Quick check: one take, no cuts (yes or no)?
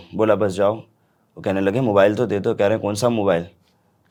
yes